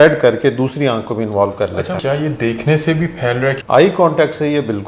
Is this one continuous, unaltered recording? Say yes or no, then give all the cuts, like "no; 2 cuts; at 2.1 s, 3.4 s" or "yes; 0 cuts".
no; 2 cuts; at 2.0 s, 3.6 s